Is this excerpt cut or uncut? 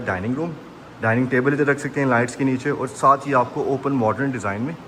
uncut